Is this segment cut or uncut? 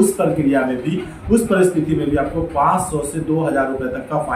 uncut